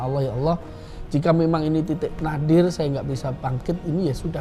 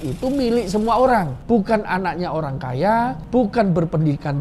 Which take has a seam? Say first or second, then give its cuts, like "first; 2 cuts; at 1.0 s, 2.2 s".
second; 2 cuts; at 1.3 s, 3.2 s